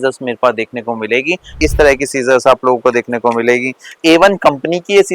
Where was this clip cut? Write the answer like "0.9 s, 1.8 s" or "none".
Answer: 1.6 s, 3.9 s